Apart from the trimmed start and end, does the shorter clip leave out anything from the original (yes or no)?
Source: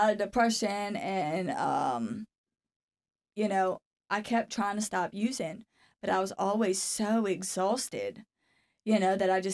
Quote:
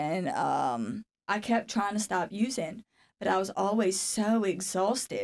yes